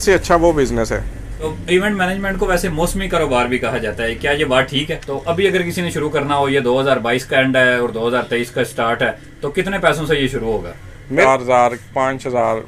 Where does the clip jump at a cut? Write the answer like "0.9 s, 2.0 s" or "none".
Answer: 1.5 s, 5.0 s, 11.2 s